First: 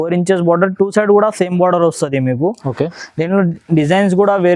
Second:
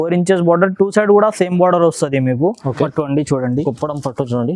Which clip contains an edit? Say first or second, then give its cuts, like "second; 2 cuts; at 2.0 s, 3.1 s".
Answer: second; 1 cut; at 2.9 s